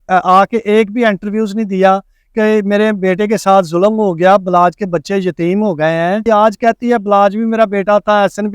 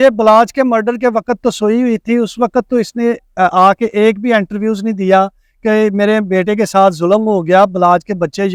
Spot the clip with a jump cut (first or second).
first